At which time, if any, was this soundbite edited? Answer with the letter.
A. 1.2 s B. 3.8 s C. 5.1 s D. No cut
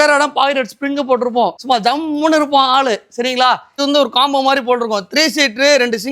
B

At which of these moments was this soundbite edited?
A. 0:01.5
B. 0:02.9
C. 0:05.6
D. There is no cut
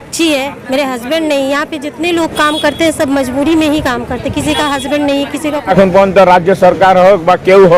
C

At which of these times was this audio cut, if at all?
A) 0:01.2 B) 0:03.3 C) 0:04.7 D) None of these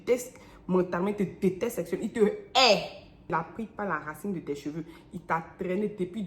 B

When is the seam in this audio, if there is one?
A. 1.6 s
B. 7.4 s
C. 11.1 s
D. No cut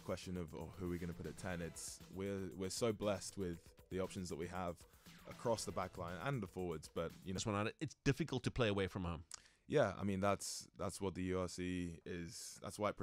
B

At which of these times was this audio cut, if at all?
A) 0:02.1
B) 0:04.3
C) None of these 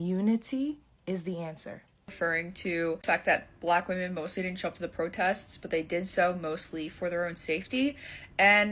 A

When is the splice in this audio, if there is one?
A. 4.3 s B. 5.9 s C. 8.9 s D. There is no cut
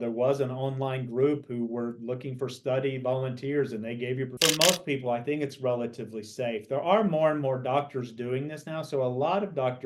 A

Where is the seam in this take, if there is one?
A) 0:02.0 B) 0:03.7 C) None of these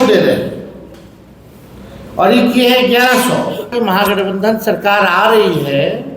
B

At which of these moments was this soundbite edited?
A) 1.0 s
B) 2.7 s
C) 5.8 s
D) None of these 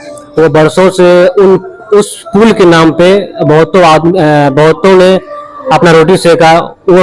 D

